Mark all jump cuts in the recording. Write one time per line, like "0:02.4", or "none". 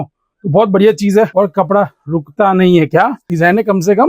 0:01.3
0:03.2